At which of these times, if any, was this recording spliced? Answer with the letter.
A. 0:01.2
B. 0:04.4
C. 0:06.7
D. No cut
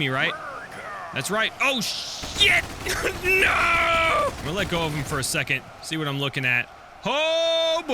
B